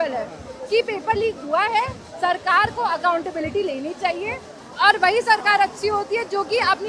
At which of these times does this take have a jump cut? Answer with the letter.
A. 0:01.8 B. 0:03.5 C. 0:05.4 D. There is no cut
D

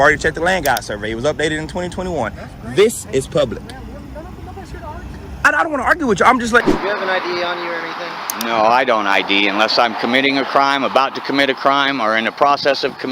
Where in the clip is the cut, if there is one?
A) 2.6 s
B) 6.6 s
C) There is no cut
B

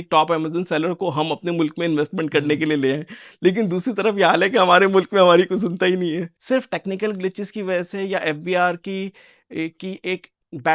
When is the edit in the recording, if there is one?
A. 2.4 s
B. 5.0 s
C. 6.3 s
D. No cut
C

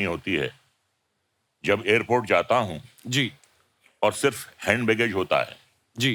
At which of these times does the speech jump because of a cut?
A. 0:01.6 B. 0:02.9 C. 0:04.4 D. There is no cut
D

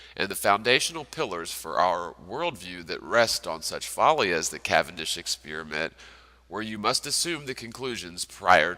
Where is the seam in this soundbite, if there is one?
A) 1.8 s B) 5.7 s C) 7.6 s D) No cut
A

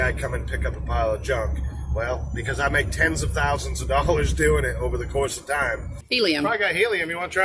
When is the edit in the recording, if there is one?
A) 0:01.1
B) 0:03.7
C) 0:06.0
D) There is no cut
C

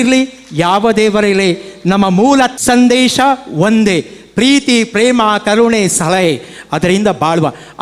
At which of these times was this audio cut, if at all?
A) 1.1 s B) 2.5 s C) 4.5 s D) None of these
B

